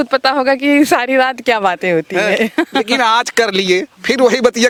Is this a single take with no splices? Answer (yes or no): yes